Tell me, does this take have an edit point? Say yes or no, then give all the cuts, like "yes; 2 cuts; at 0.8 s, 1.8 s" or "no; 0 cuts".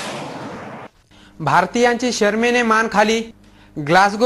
yes; 1 cut; at 1.0 s